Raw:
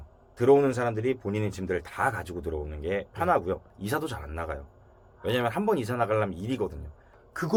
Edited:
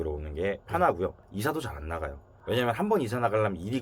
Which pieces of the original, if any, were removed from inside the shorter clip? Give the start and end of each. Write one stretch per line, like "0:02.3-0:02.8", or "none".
0:04.7-0:05.0